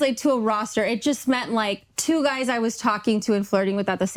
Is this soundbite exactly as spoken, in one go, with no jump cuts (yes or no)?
yes